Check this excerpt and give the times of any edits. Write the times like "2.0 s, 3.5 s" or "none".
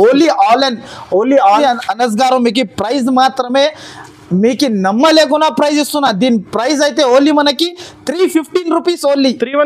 1.6 s